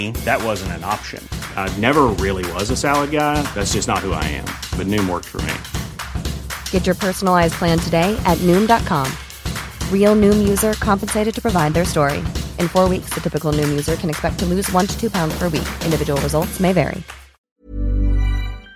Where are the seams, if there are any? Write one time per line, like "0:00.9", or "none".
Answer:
0:17.6